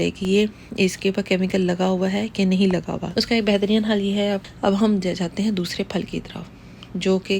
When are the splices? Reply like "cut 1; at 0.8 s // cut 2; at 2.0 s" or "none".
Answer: cut 1; at 3.0 s // cut 2; at 4.4 s